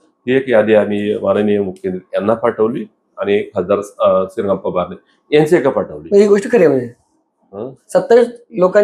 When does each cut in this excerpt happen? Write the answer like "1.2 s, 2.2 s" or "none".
none